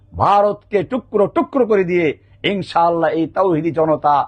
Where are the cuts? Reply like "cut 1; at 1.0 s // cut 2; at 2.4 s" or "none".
none